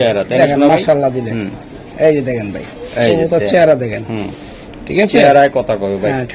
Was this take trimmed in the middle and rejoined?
no; 0 cuts

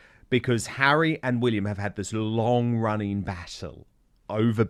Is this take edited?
no; 0 cuts

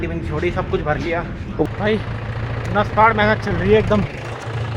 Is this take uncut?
no; 1 cut; at 1.7 s

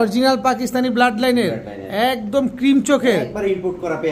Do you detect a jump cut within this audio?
no; 0 cuts

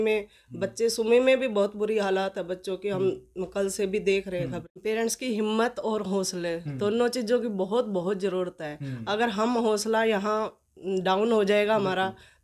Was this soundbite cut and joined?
yes; 1 cut; at 4.6 s

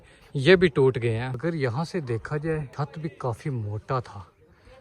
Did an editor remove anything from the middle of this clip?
yes; 2 cuts; at 1.2 s, 2.7 s

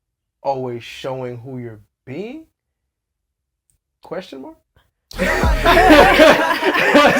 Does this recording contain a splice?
no; 0 cuts

